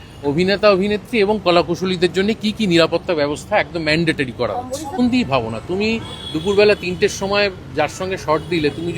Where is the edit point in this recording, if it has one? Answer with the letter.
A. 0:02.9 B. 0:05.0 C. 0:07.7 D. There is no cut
B